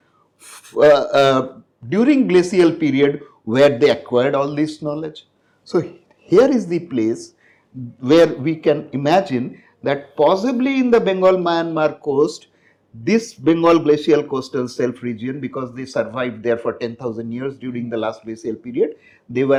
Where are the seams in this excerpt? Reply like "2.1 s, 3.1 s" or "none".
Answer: none